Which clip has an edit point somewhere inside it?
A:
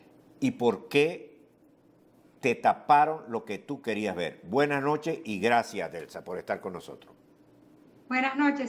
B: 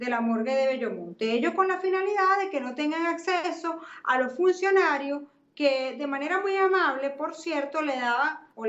A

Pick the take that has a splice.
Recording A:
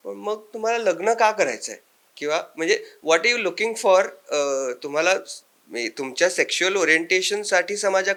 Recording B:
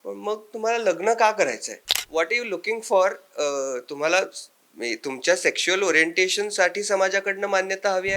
B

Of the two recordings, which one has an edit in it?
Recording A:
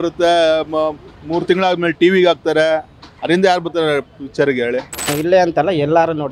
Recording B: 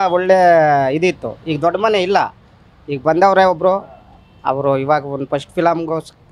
A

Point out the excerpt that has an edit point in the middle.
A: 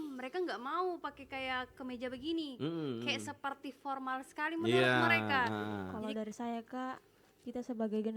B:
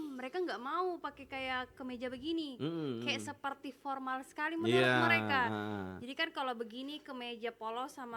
A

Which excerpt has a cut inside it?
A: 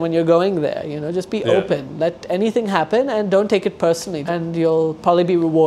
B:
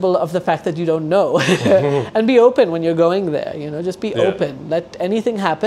A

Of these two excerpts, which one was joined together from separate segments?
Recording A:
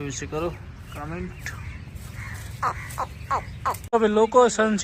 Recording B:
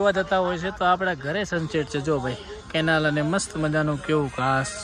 A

